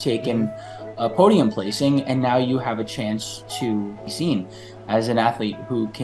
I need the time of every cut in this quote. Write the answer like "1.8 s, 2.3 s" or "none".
4.0 s